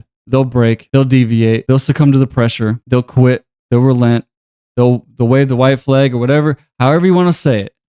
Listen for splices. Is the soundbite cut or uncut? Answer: cut